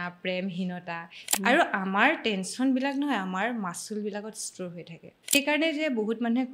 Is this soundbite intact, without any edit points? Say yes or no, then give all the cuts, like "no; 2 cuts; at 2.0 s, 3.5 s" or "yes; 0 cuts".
no; 2 cuts; at 1.3 s, 5.3 s